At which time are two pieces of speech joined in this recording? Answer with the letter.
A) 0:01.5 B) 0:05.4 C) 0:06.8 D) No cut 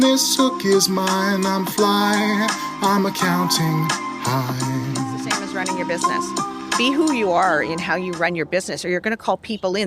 C